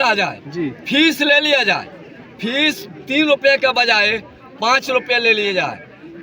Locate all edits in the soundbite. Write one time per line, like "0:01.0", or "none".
none